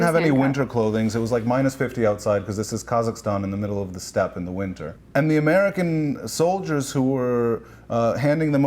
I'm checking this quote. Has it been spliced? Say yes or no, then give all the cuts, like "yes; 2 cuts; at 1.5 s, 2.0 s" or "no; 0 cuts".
yes; 1 cut; at 4.9 s